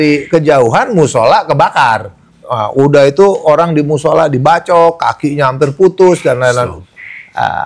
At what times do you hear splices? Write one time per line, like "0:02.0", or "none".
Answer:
0:02.5
0:06.8